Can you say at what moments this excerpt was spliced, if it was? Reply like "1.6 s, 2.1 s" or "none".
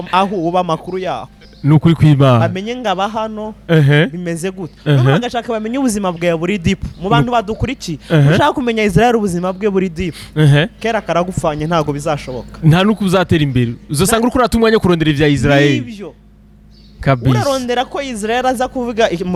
none